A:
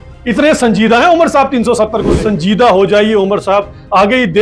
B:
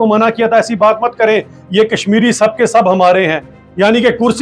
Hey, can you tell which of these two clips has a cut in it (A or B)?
A